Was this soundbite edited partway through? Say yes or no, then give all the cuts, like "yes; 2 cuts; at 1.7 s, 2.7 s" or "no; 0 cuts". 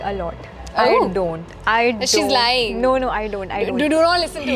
no; 0 cuts